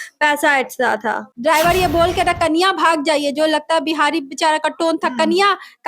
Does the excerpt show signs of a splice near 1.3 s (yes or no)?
yes